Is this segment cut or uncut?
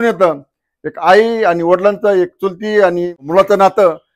cut